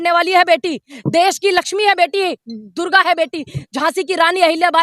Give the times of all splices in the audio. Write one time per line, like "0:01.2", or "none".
none